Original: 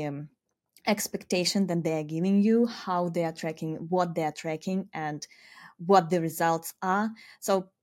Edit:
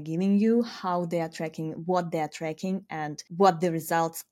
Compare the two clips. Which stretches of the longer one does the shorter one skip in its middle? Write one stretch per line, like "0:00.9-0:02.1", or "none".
0:05.2-0:05.7